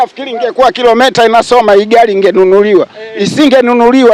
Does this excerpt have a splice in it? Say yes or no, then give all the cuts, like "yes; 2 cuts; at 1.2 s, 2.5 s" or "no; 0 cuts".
no; 0 cuts